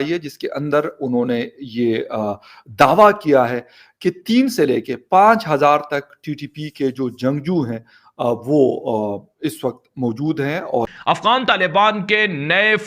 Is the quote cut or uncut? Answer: cut